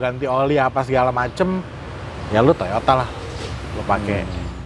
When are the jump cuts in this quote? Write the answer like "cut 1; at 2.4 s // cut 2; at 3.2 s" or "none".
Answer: none